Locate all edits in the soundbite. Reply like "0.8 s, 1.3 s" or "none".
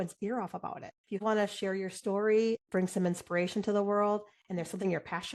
1.2 s

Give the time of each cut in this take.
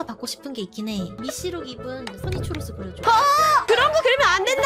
1.1 s, 3.7 s

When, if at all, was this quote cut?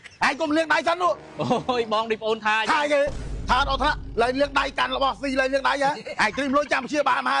6.1 s

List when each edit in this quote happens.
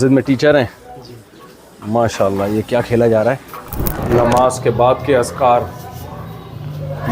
4.0 s

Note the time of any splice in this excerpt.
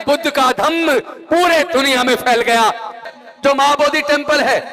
3.0 s

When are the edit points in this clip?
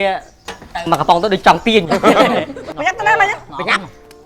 2.6 s

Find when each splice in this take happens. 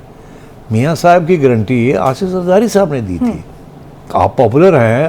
4.1 s

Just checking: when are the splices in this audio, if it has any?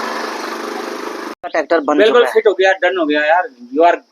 1.5 s

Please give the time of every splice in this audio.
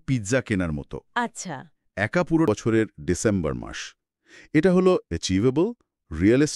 2.5 s

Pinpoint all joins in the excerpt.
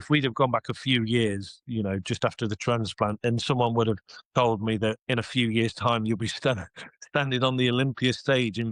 4.1 s

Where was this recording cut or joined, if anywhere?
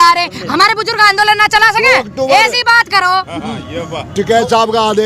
none

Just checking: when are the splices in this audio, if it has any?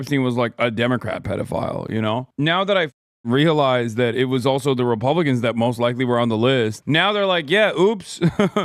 6.8 s

